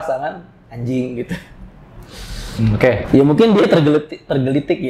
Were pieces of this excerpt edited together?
yes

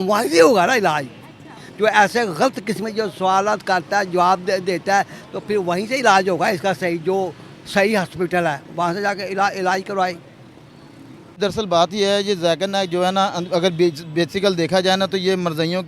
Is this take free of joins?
no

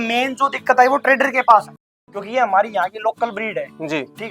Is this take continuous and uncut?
no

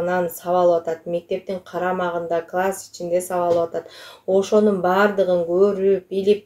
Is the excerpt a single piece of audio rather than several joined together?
yes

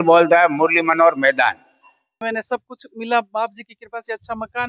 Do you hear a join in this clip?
yes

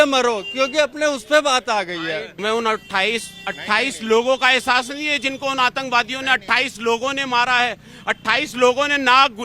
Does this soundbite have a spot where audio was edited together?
yes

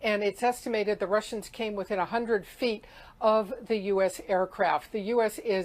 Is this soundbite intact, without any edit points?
no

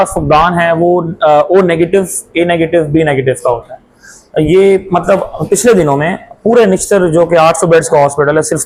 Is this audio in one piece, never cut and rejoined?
yes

